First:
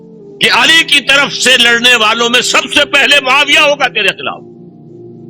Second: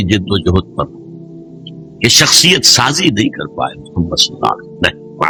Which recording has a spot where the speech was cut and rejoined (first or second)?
first